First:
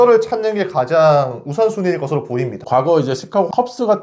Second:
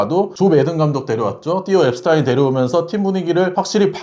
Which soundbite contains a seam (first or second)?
first